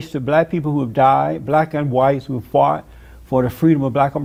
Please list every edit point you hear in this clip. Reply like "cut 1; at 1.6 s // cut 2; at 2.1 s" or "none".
none